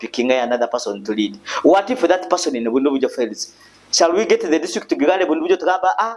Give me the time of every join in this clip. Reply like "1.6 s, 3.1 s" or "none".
none

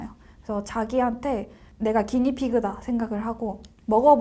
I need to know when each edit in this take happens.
1.6 s

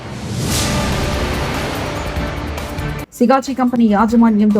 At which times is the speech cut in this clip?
3.0 s

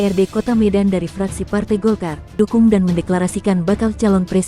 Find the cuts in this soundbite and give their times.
2.4 s

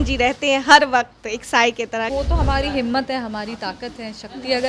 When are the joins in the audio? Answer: 2.1 s

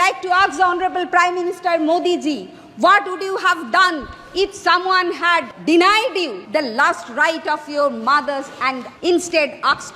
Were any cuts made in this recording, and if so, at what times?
5.5 s, 6.4 s, 8.9 s

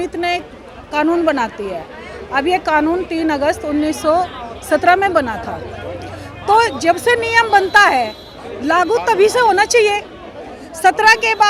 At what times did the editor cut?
none

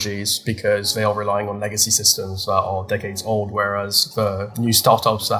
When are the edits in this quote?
none

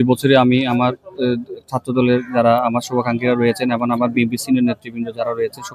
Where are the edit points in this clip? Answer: none

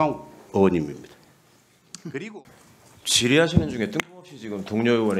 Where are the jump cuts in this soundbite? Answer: 2.4 s

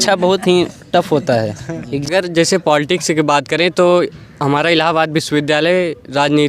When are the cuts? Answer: 1.9 s

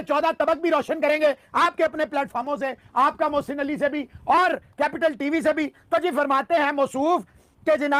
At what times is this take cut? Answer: none

